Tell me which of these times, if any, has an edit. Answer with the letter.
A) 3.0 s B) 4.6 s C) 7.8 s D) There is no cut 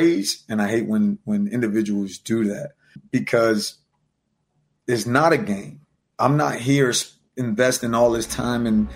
A